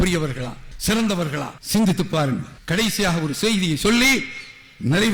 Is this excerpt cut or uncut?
uncut